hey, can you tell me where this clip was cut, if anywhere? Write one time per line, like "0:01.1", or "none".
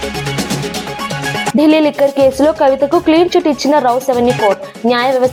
none